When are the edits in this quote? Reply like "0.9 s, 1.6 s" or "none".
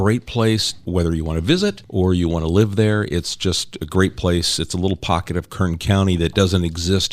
0.8 s, 1.8 s